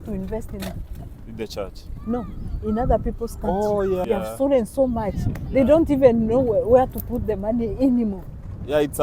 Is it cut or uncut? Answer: cut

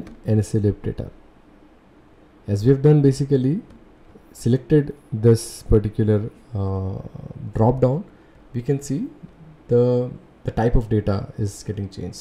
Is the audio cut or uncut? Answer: uncut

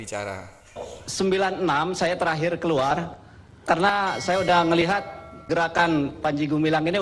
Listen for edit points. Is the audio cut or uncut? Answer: cut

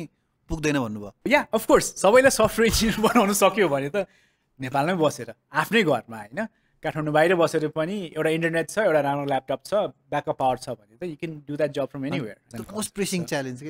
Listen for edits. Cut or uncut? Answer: cut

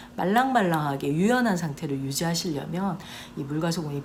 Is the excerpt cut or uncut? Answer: uncut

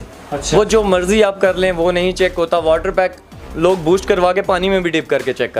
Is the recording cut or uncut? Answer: uncut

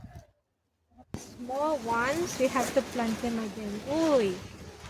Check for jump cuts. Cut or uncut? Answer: cut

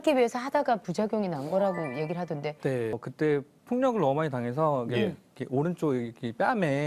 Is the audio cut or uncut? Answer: cut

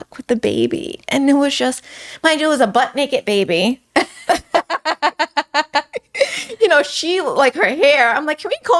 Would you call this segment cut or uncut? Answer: uncut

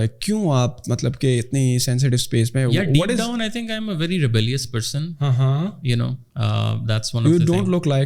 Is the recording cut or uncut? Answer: uncut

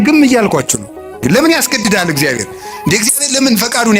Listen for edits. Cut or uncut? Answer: cut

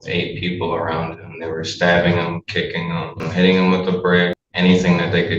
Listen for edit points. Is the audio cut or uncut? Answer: cut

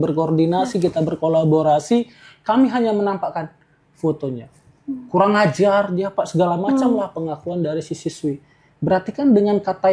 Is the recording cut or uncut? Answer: uncut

